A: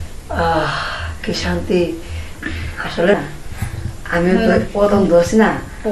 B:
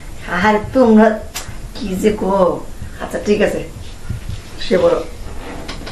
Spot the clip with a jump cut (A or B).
A